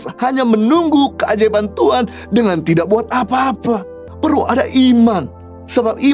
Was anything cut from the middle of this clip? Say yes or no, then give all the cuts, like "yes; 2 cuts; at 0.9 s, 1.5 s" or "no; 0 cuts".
yes; 1 cut; at 3.9 s